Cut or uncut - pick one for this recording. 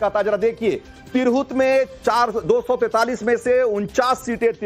cut